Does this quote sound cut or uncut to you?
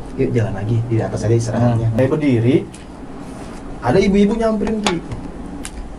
cut